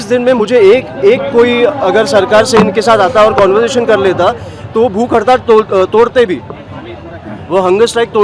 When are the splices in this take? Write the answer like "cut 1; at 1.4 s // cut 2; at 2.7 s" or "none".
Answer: none